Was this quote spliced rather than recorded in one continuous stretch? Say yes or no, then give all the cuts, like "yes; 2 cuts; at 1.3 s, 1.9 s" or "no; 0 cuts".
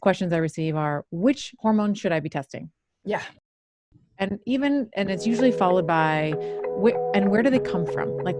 yes; 1 cut; at 1.5 s